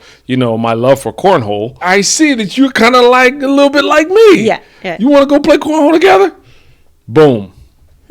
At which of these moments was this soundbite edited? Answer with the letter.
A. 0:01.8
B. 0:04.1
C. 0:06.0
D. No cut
A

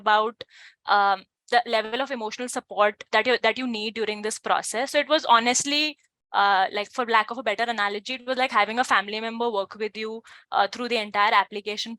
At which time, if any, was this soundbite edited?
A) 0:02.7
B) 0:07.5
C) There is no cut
C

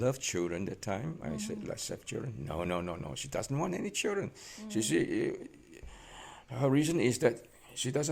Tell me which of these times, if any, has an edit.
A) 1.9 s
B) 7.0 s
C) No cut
C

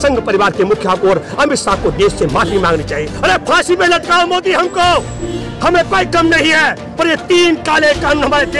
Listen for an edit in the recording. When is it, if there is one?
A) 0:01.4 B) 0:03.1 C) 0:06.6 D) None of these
B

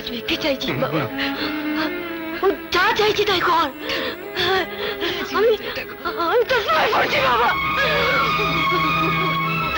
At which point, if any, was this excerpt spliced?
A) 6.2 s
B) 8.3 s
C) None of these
C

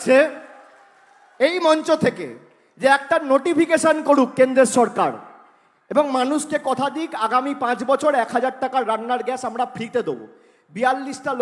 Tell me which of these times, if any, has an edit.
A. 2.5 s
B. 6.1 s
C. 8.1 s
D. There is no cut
D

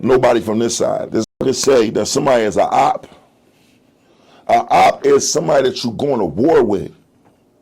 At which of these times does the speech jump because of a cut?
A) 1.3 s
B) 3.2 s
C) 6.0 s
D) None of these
A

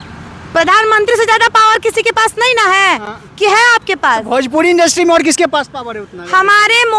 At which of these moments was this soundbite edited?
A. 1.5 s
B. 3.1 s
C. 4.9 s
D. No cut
D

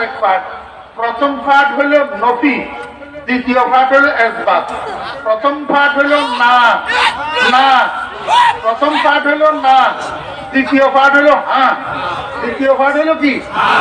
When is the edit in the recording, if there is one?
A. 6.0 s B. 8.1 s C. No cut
C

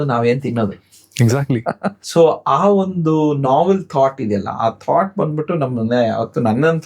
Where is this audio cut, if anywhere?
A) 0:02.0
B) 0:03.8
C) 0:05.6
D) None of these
A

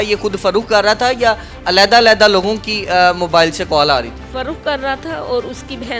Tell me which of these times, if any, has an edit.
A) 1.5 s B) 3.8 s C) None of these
C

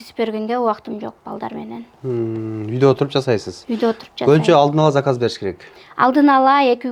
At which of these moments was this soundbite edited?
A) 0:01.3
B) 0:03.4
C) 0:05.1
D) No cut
D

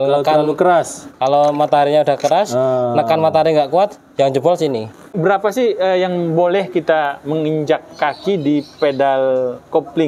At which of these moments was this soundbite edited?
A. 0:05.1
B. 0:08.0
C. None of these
A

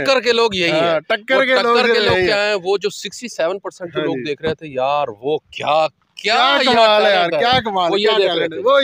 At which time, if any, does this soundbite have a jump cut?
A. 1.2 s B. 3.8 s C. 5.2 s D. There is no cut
D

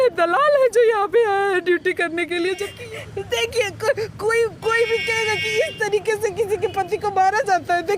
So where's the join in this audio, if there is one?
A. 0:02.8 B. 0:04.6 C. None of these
A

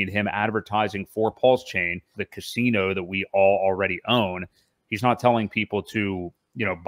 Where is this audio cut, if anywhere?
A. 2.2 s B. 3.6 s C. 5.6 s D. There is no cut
A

